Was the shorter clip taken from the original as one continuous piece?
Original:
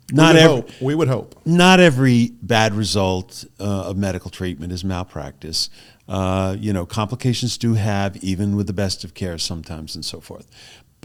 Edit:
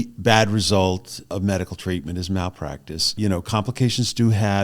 no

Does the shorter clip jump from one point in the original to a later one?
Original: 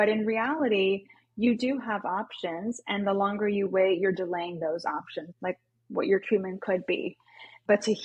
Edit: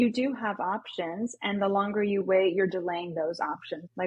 no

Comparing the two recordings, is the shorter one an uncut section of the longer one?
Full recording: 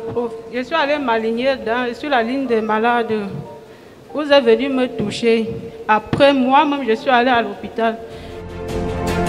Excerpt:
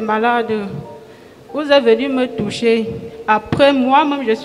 yes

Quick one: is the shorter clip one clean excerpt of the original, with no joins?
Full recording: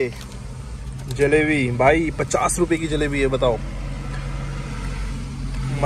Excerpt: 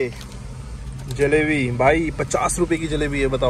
yes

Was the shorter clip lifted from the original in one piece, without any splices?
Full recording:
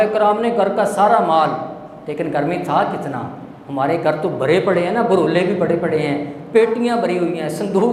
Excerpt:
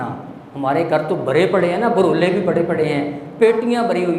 yes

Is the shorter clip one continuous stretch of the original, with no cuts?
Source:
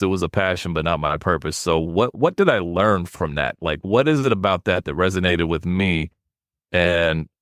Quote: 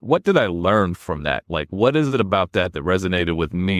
yes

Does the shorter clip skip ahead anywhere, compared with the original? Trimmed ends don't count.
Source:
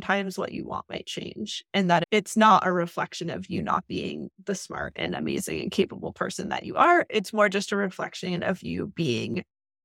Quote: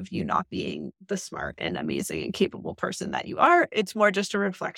no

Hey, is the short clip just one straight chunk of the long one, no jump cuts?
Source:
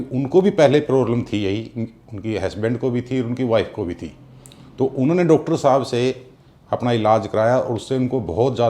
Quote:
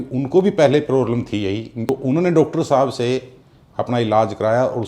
no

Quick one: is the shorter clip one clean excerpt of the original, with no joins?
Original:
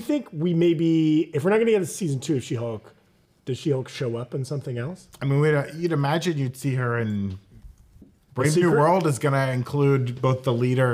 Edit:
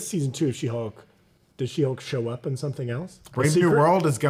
no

